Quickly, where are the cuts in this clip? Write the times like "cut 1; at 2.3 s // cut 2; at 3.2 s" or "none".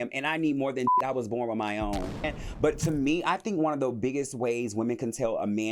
cut 1; at 2.4 s